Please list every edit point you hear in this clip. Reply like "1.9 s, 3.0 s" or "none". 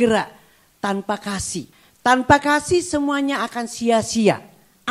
1.8 s